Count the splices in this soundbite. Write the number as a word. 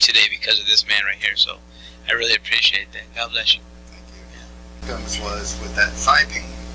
one